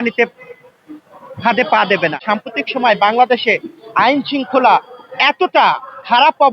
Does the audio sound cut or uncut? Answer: cut